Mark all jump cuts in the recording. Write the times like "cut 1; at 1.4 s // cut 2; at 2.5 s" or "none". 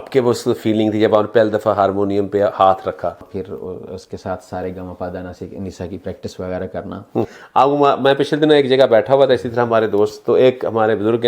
cut 1; at 3.3 s // cut 2; at 7.4 s